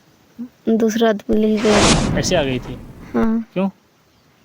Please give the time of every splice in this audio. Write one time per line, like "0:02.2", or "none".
0:01.9